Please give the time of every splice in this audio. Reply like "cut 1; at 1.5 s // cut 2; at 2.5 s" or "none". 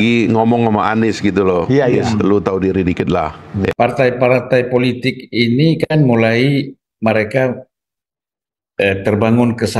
cut 1; at 3.7 s